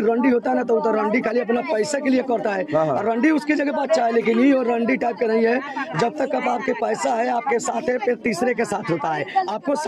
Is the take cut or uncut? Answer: uncut